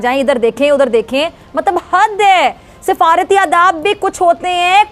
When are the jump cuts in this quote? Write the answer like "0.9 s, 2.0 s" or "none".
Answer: none